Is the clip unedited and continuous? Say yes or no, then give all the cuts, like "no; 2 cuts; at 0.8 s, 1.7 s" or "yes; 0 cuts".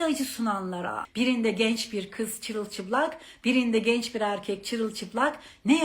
no; 1 cut; at 1.0 s